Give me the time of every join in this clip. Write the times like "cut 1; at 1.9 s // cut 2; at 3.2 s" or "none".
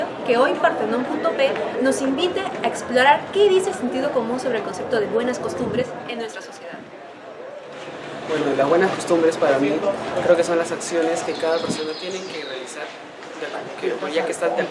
cut 1; at 11.5 s

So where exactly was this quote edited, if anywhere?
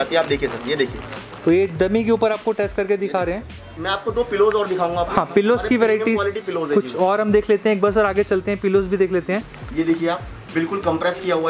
none

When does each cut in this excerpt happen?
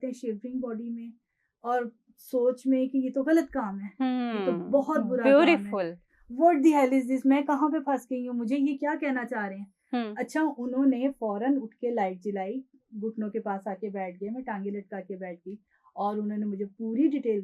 none

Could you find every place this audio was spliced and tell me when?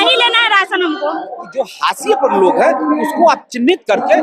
cut 1; at 1.4 s

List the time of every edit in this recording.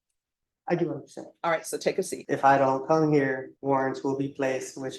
cut 1; at 2.2 s // cut 2; at 3.5 s

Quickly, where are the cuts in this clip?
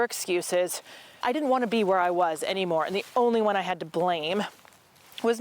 cut 1; at 1.2 s

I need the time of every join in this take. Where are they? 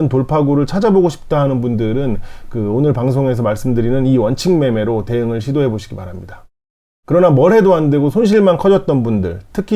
cut 1; at 6.6 s

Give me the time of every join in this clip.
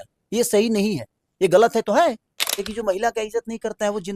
cut 1; at 2.6 s

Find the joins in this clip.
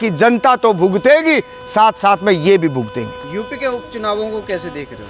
none

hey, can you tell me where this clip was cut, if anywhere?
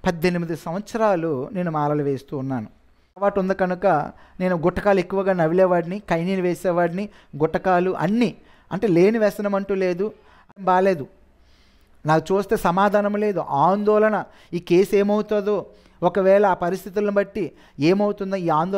cut 1; at 3.2 s // cut 2; at 10.6 s

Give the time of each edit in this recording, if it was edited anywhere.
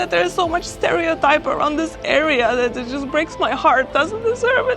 cut 1; at 3.9 s

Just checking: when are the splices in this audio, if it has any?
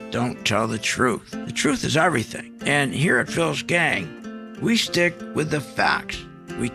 none

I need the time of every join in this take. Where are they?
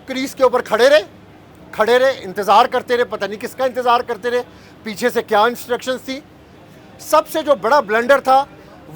cut 1; at 6.6 s

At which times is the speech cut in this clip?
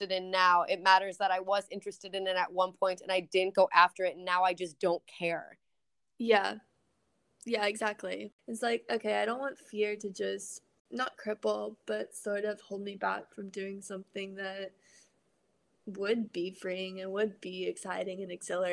cut 1; at 8.3 s

